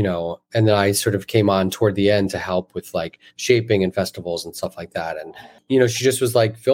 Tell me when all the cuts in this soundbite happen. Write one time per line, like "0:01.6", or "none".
0:05.5